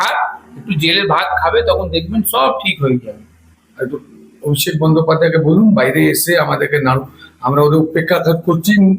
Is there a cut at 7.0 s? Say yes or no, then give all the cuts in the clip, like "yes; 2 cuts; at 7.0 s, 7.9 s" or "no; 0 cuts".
no; 1 cut; at 3.1 s